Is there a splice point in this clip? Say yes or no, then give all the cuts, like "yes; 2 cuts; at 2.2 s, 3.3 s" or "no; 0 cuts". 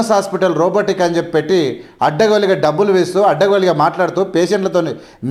no; 0 cuts